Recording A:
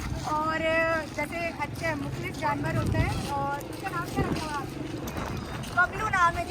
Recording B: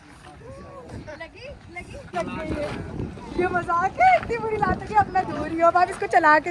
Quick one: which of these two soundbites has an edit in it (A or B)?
B